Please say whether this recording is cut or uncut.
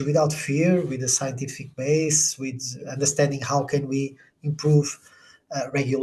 uncut